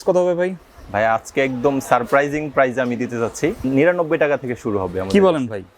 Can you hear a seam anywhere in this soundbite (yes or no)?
yes